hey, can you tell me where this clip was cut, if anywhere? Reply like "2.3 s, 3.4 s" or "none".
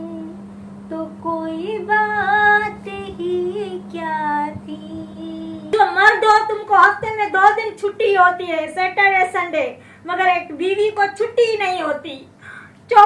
5.6 s